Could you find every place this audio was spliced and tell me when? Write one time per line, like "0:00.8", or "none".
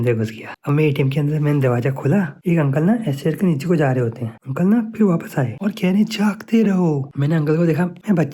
0:02.4
0:04.3
0:05.6